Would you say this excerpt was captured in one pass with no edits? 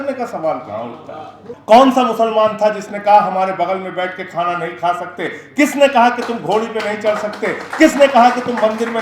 no; 1 cut; at 1.5 s

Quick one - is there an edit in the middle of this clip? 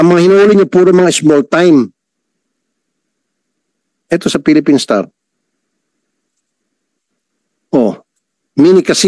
no; 0 cuts

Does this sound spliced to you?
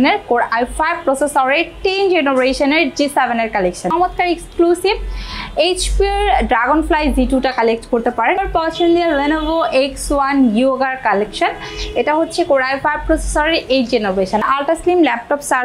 yes; 3 cuts; at 3.9 s, 8.4 s, 14.5 s

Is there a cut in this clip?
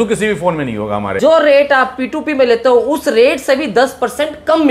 yes; 1 cut; at 1.1 s

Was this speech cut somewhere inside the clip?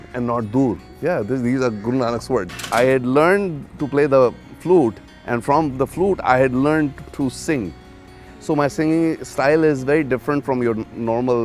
yes; 2 cuts; at 0.9 s, 2.5 s

